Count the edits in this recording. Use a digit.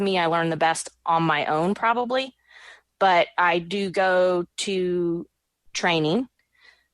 0